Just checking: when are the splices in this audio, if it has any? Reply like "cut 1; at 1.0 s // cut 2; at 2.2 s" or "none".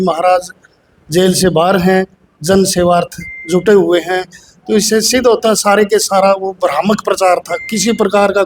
none